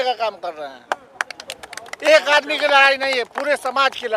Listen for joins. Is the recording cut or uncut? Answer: uncut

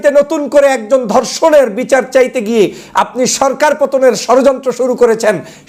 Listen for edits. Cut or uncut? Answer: uncut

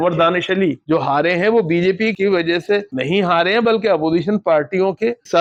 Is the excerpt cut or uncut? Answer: uncut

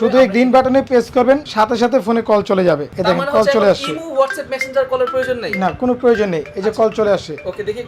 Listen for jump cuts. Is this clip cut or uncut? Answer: cut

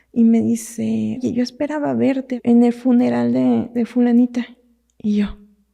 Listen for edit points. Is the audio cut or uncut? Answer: cut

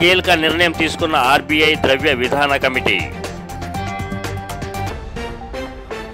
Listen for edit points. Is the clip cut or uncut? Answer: cut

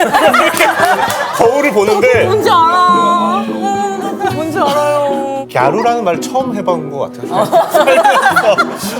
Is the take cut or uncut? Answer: cut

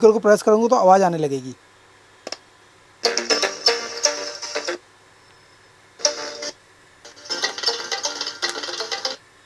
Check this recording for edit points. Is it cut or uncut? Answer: uncut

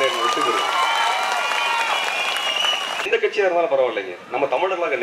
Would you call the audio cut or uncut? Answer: cut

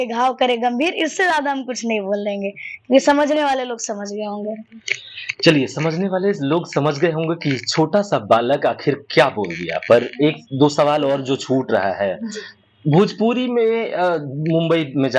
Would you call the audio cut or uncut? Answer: uncut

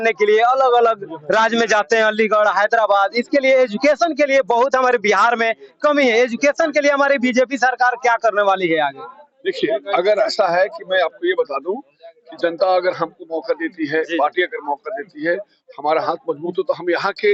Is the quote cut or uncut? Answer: uncut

